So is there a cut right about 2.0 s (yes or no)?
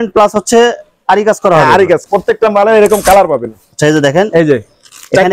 yes